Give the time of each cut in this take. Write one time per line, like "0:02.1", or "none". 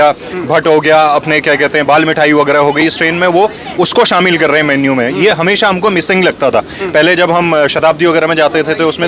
none